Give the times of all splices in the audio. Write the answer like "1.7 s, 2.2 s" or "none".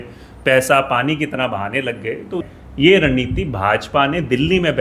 2.5 s

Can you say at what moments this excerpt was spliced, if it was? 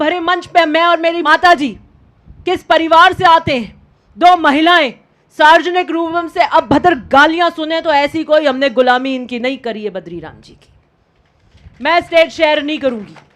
1.2 s

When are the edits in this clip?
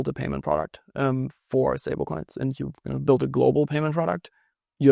none

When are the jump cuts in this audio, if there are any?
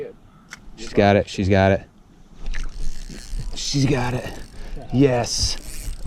none

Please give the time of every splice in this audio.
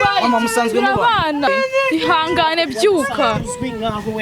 1.5 s

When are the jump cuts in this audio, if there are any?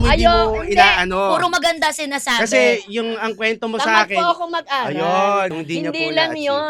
5.5 s

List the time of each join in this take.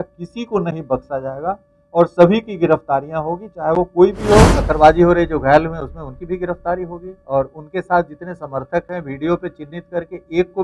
4.6 s

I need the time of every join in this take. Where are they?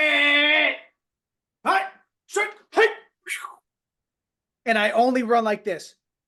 none

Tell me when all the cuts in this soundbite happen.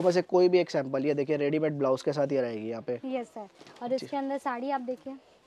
none

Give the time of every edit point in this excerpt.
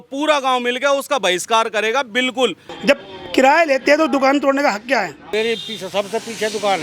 2.6 s, 5.2 s

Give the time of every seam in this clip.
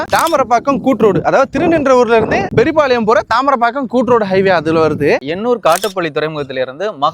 5.2 s

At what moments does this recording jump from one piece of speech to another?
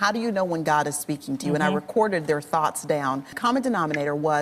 3.3 s

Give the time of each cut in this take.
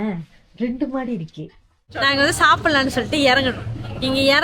1.9 s

